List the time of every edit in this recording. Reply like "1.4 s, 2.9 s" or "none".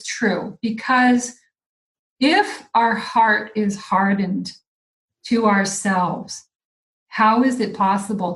none